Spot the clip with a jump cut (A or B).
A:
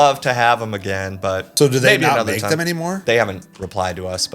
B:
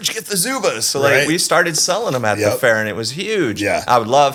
A